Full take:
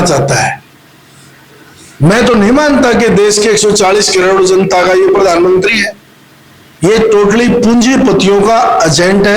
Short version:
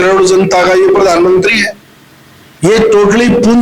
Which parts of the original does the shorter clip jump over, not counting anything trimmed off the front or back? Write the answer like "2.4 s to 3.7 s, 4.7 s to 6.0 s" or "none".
none